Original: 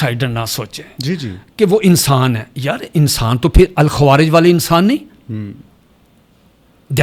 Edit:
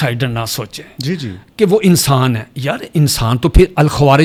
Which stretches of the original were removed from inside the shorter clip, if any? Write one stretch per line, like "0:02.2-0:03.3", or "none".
none